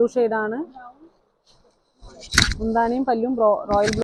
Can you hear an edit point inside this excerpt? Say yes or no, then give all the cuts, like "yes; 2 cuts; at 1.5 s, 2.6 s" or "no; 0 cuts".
no; 0 cuts